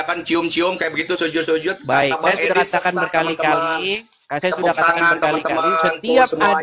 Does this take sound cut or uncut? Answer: uncut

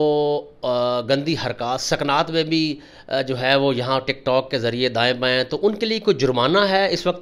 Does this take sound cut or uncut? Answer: uncut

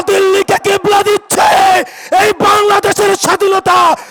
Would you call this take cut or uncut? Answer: uncut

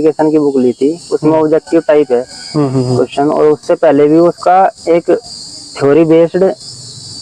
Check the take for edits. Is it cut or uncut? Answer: uncut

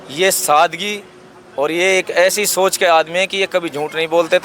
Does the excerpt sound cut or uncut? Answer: uncut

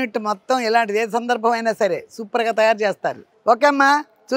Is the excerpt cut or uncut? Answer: cut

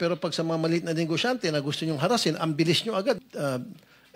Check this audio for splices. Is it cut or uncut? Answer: cut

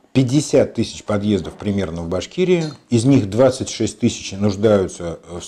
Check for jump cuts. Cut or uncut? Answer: uncut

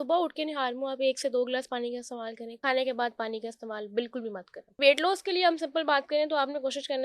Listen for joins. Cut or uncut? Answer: cut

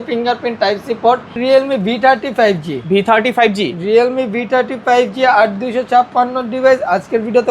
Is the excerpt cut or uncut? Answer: cut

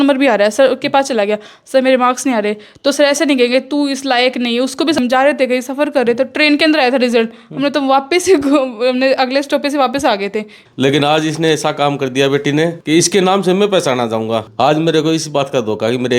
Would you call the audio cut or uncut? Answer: cut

